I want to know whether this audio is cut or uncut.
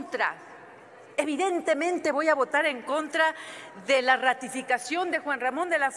uncut